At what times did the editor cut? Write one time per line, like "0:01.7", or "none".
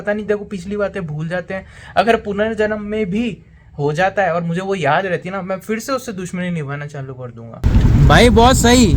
0:07.6